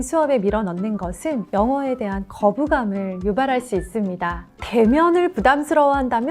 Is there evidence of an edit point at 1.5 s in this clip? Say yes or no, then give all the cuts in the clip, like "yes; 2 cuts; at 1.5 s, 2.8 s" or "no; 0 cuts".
no; 1 cut; at 4.4 s